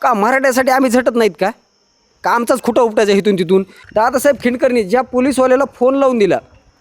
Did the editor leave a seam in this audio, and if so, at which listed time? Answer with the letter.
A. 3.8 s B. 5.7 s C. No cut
A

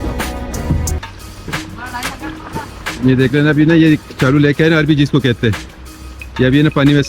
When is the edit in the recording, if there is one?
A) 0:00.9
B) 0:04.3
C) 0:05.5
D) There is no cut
A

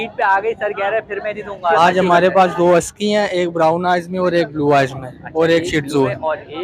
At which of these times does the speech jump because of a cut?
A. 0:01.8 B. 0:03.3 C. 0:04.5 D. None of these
A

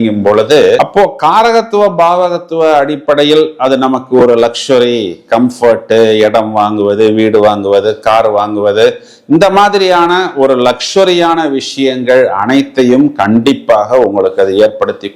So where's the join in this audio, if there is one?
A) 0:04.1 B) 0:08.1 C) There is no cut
C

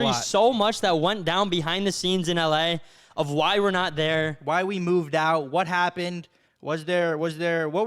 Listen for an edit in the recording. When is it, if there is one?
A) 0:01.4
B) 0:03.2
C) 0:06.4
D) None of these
D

